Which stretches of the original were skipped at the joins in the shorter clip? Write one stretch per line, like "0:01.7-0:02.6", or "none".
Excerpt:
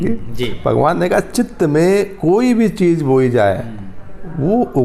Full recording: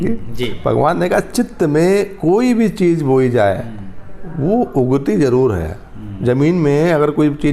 none